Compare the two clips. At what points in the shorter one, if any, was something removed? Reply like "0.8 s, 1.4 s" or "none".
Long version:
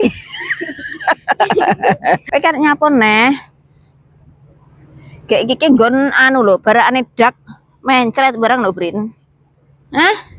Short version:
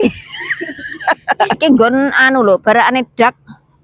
1.5 s

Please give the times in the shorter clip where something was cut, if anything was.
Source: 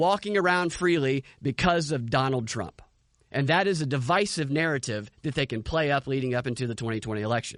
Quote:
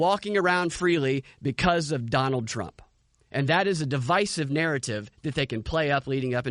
none

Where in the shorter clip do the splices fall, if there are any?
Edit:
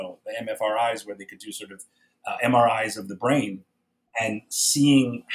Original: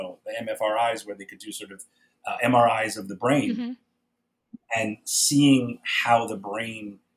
3.5 s

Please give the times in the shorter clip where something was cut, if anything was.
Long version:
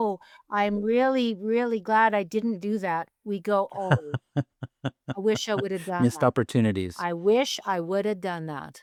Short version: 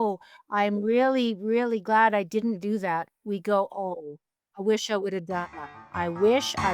3.9 s, 5.6 s

